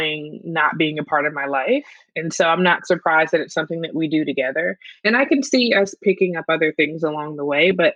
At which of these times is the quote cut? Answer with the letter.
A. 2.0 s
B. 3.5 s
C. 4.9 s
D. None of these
D